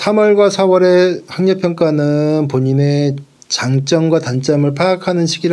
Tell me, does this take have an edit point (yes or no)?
no